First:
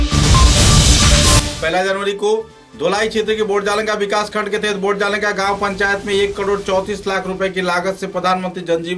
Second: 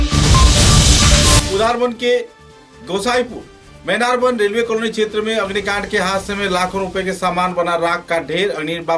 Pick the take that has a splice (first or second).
second